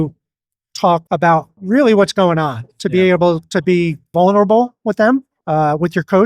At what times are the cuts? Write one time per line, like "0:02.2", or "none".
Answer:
0:01.1
0:04.0
0:05.3